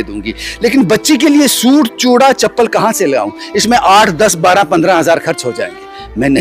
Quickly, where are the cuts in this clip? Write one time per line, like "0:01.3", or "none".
none